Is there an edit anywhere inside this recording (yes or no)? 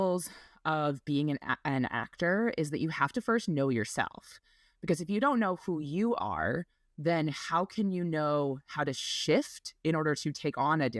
no